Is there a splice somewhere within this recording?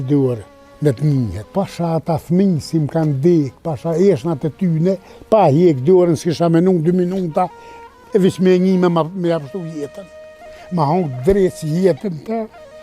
yes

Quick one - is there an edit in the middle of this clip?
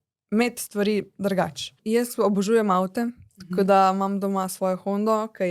yes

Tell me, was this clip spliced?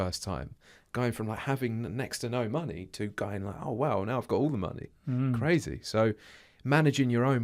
no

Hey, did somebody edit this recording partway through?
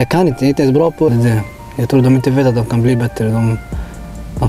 yes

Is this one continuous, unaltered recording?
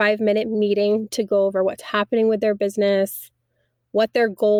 yes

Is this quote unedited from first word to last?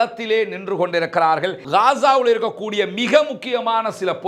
no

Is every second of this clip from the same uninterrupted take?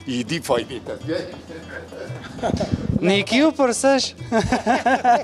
yes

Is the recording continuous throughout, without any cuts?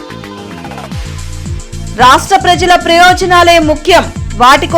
yes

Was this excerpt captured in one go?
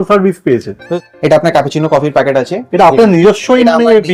no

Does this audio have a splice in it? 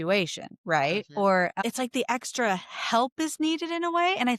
yes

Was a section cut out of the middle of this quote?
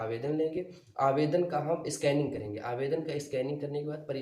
no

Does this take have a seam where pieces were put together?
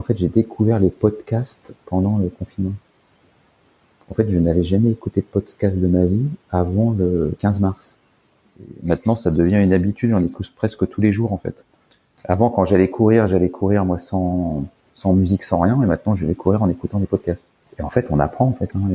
yes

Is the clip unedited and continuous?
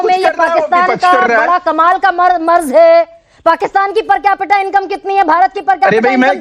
yes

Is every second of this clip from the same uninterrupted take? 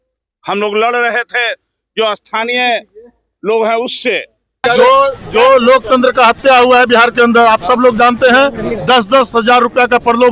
no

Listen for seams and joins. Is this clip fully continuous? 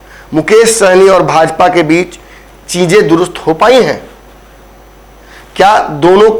yes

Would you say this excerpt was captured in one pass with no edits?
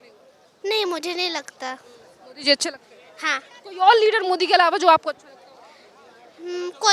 yes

